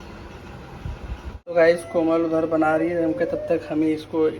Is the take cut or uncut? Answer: cut